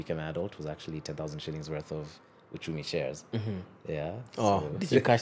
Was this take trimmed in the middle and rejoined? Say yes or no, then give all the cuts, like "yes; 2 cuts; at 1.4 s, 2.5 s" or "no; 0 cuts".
no; 0 cuts